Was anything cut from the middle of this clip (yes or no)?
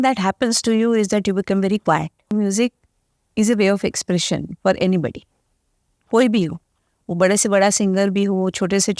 yes